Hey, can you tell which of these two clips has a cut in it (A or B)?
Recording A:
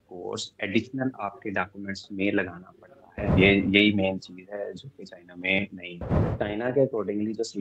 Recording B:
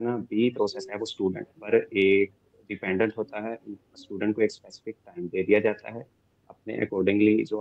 A